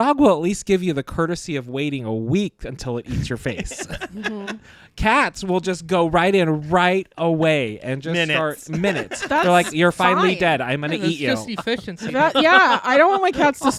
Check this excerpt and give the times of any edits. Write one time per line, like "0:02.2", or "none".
none

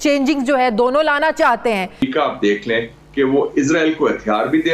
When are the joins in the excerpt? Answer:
0:02.0

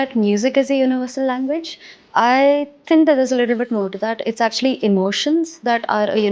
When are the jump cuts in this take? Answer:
none

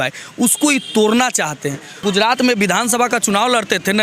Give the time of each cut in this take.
0:02.0

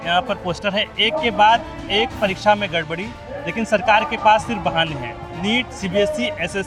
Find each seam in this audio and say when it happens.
none

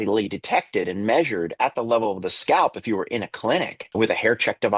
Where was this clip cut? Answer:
0:03.8

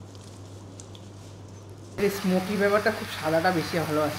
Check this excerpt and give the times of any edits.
0:02.0

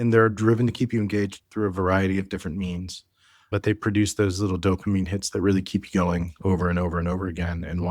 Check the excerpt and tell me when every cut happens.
0:03.5

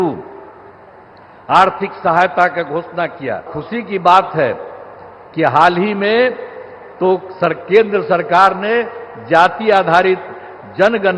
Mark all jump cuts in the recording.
0:03.6

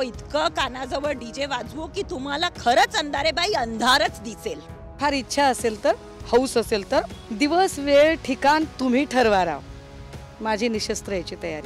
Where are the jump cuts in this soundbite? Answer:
0:01.2
0:05.0
0:07.2

